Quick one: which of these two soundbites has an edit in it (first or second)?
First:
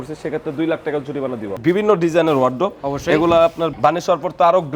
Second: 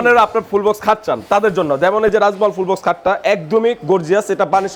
first